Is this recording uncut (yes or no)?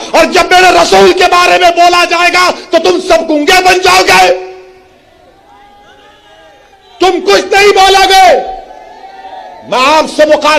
yes